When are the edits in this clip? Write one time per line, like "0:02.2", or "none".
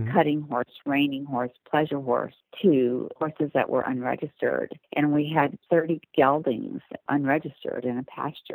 0:02.4
0:03.1
0:04.8
0:05.6
0:07.0